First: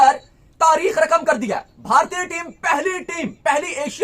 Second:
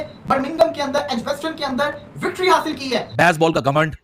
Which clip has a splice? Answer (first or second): second